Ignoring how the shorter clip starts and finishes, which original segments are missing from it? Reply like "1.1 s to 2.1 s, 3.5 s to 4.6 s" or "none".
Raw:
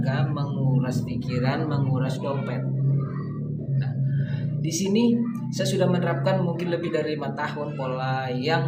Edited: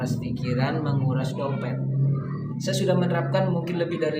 3.4 s to 5.4 s